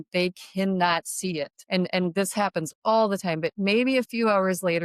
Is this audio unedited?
no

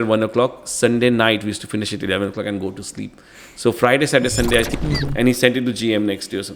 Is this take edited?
yes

